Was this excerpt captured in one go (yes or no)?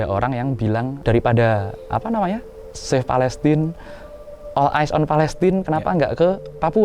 no